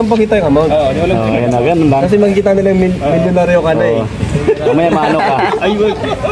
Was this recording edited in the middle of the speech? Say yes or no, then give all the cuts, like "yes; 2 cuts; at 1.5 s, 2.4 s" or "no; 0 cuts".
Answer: no; 0 cuts